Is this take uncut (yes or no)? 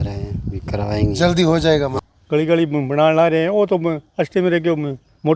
no